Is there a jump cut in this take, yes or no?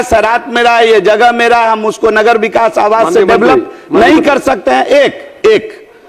no